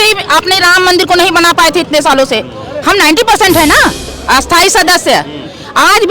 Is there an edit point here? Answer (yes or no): yes